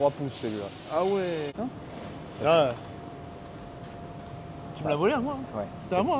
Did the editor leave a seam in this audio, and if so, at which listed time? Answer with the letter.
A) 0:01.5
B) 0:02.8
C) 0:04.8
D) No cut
A